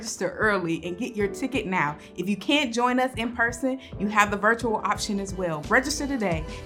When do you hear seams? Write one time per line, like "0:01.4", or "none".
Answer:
0:05.6